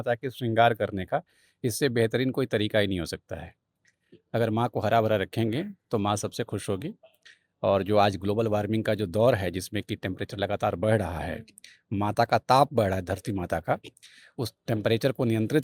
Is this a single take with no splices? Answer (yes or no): yes